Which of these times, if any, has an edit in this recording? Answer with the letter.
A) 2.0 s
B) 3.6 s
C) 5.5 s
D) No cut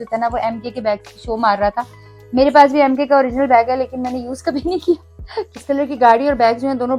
C